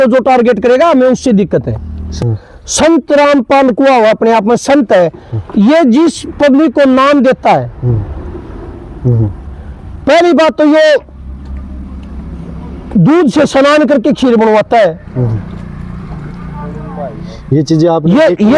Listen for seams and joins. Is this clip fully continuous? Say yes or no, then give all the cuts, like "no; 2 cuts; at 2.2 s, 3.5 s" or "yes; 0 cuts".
no; 1 cut; at 2.1 s